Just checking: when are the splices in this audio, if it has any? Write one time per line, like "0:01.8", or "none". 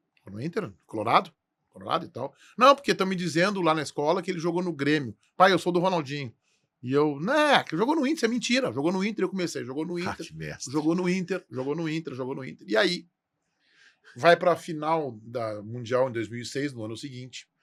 none